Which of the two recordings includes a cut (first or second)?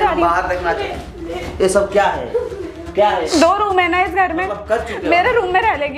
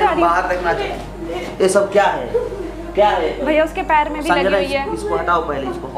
first